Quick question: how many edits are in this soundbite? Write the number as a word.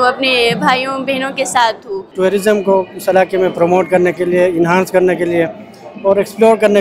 one